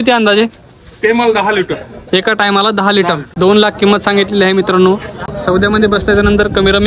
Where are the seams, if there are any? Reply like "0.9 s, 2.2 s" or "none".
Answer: 3.3 s